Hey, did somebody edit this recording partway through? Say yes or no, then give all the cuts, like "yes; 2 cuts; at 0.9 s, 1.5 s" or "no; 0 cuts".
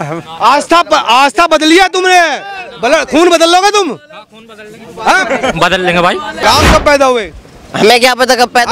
yes; 1 cut; at 6.4 s